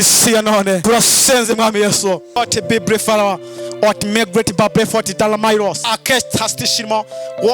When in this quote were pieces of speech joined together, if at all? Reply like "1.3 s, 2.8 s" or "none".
0.8 s, 2.4 s, 5.9 s